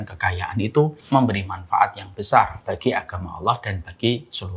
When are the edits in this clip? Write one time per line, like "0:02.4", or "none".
0:01.0